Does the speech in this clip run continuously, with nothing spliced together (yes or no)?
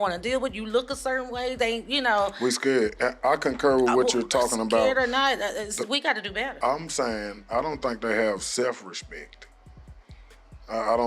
no